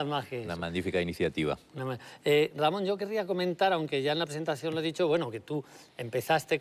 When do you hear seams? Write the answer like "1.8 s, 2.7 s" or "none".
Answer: 2.5 s